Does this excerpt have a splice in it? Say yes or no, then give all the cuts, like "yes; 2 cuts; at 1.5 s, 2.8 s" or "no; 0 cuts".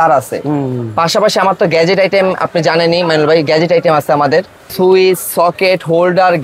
yes; 1 cut; at 4.7 s